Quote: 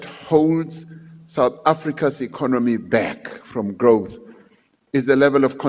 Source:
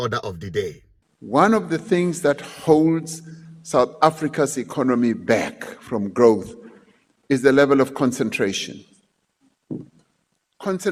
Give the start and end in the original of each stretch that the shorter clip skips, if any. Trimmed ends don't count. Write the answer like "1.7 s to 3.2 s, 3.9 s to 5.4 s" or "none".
none